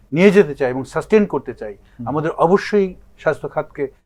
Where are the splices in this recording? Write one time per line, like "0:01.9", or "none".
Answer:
none